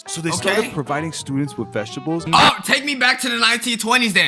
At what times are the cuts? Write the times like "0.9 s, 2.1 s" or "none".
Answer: 2.2 s